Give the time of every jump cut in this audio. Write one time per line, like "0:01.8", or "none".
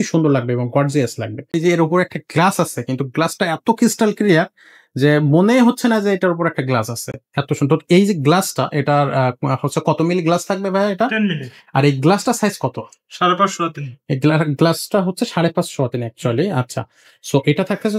0:01.5